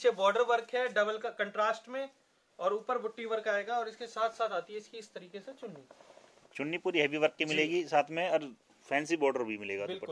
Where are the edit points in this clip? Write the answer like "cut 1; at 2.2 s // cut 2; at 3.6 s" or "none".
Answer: none